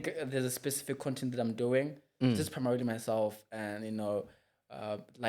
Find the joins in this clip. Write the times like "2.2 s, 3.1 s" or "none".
none

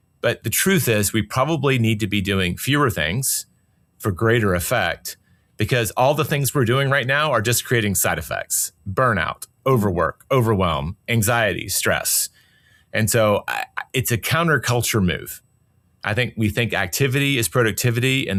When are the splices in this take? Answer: none

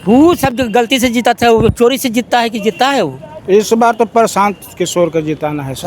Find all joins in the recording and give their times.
3.3 s

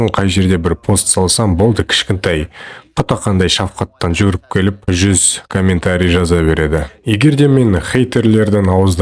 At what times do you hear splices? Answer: none

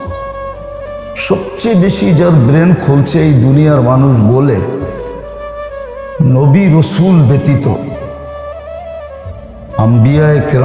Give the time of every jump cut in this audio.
none

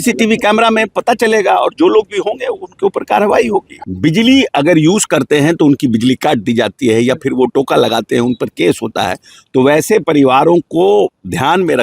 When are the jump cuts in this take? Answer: 3.8 s

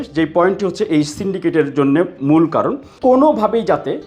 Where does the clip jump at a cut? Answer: 2.9 s

